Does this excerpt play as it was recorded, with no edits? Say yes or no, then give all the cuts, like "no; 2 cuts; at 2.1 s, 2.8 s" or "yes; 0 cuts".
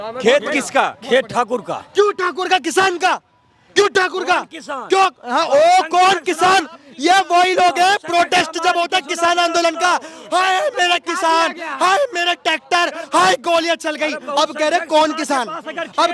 yes; 0 cuts